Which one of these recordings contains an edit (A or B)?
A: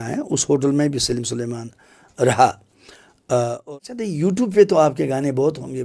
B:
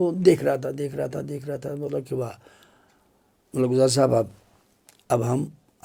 A